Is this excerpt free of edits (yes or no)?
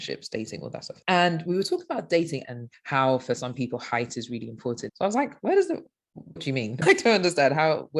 no